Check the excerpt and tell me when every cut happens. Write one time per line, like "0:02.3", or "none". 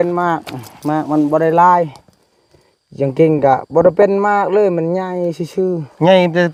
none